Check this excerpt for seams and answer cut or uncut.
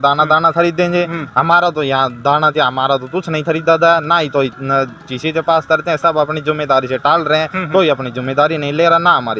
uncut